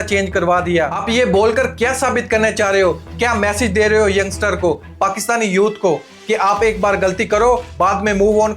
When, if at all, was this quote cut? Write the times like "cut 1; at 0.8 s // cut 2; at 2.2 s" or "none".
cut 1; at 1.0 s